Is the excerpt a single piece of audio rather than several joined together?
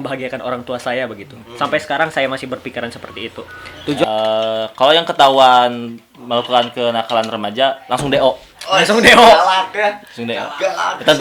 no; 1 cut; at 4.0 s

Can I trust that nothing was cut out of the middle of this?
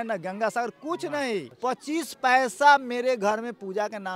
no; 1 cut; at 1.5 s

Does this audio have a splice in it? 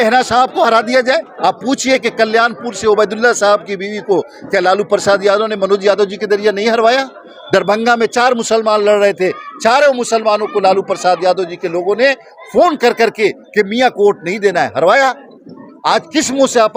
no; 0 cuts

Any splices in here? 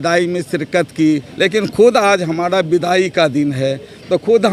yes; 1 cut; at 1.3 s

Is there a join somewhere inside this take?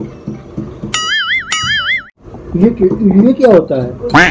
yes; 1 cut; at 2.0 s

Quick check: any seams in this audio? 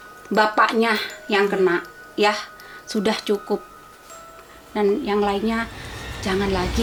no; 0 cuts

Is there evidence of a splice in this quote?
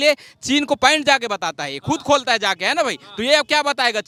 no; 0 cuts

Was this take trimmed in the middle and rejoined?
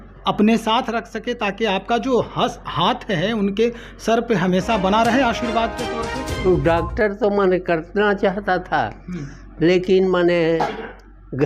no; 0 cuts

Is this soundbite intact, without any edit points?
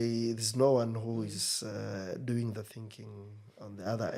yes; 0 cuts

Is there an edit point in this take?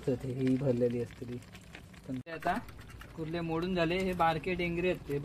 yes; 1 cut; at 2.2 s

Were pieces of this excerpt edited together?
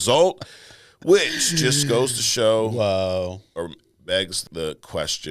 yes; 1 cut; at 4.4 s

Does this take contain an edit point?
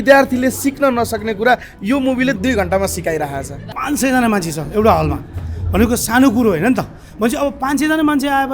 yes; 2 cuts; at 2.4 s, 3.8 s

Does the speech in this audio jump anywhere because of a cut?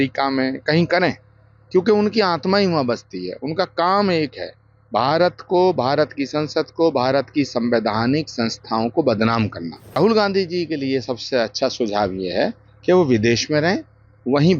yes; 1 cut; at 10.0 s

